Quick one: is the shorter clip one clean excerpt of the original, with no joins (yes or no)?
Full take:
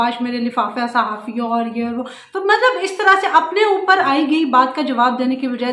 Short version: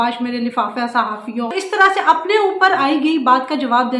no